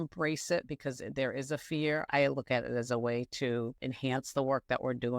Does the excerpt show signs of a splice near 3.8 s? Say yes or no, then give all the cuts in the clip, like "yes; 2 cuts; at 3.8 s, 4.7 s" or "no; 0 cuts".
yes; 2 cuts; at 2.1 s, 3.8 s